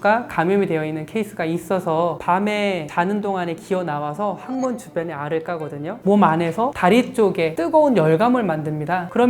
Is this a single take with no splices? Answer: no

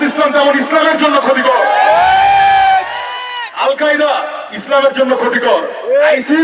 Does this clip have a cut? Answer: no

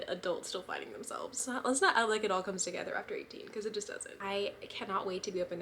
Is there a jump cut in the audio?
yes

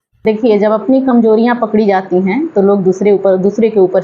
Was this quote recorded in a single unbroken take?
yes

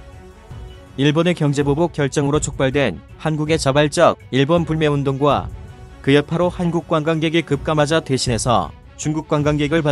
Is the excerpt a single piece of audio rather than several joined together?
no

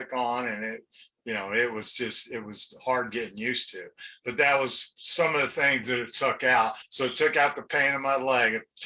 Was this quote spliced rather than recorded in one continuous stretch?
no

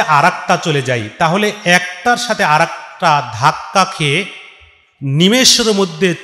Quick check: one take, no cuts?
yes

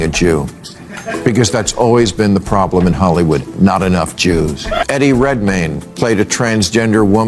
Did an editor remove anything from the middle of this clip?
yes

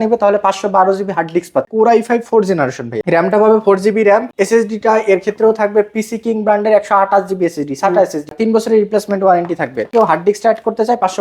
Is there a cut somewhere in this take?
yes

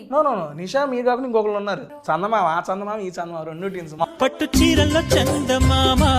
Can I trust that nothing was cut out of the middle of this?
no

